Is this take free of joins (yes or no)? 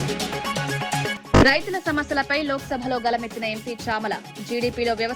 yes